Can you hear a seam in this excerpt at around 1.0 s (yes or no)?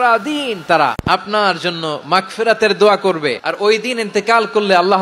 yes